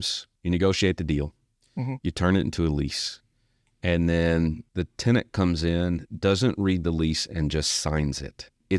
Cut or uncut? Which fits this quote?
uncut